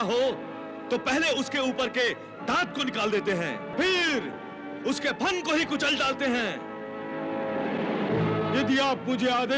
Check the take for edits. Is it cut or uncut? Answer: cut